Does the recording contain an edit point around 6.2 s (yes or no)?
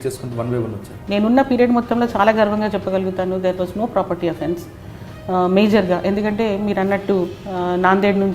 no